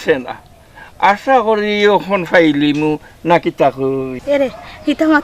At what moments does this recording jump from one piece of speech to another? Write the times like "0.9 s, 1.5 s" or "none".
4.1 s

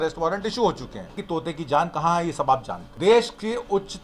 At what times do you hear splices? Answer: 1.2 s, 2.8 s

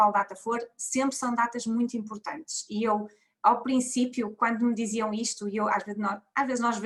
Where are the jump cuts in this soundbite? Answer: none

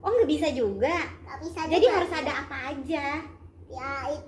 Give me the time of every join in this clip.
none

